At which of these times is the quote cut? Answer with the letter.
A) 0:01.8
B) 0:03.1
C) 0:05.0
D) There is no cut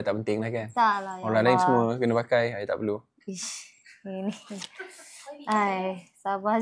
D